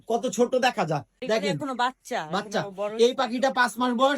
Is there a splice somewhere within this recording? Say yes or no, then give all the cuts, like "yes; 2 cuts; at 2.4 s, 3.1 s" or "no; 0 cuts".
yes; 1 cut; at 1.2 s